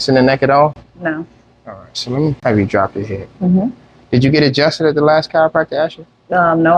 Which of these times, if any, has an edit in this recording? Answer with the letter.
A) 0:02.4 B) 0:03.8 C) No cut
A